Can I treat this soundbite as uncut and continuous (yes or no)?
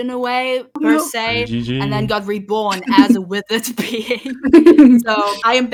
yes